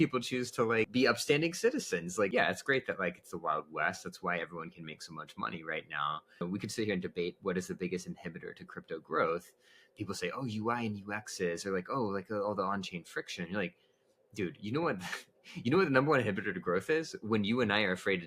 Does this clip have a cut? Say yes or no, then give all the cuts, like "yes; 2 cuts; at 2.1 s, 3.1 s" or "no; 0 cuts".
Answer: yes; 3 cuts; at 0.9 s, 2.3 s, 6.4 s